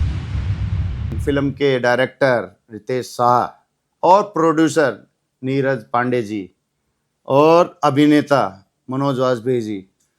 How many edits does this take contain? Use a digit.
1